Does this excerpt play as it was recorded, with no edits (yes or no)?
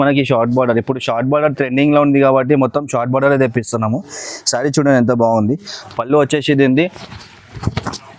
yes